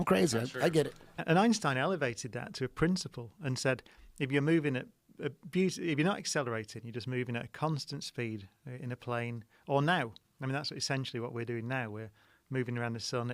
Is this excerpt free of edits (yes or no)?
no